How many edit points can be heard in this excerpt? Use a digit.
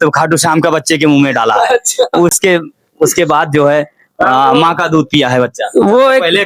0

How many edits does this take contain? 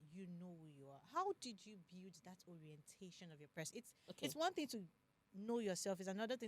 1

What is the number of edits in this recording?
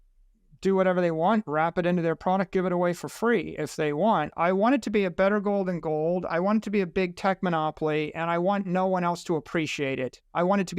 1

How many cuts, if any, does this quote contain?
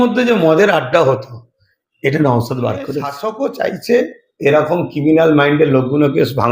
1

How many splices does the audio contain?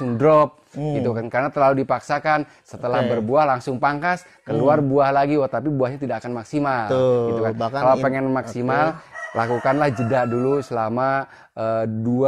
0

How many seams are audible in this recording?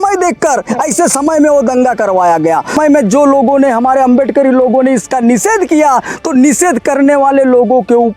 1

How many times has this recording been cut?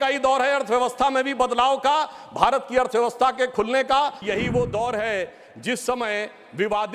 1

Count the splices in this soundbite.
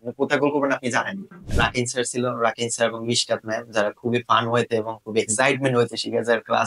1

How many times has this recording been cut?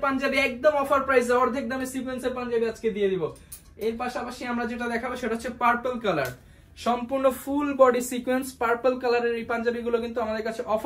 0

